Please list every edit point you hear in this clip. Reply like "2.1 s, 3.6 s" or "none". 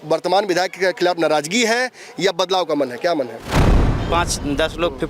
3.8 s